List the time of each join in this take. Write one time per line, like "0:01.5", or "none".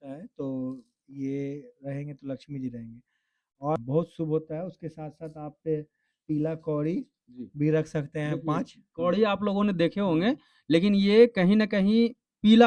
0:03.8